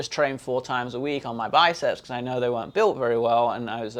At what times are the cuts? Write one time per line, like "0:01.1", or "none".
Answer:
none